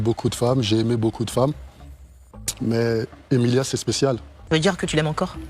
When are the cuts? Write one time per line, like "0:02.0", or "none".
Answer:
0:04.3